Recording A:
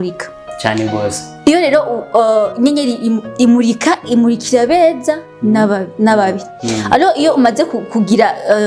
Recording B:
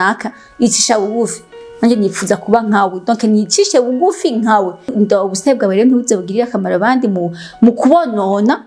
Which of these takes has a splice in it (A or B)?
B